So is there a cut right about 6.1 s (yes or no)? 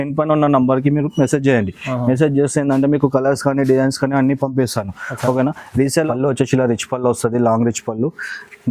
yes